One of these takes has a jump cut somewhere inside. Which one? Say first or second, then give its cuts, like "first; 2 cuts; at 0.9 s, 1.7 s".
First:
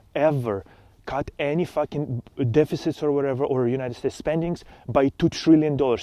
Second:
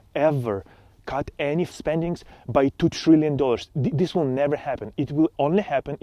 second; 1 cut; at 1.7 s